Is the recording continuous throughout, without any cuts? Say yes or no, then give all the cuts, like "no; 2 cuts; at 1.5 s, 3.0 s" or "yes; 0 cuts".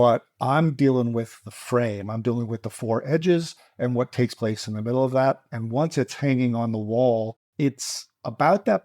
no; 1 cut; at 7.4 s